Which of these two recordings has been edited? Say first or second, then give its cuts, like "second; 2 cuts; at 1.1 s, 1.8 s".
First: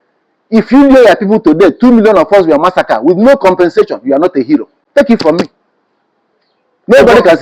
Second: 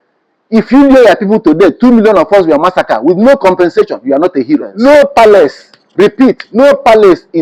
second; 1 cut; at 4.7 s